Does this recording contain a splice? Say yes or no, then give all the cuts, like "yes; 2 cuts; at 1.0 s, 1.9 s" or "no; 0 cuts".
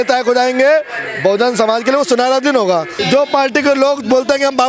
yes; 1 cut; at 3.0 s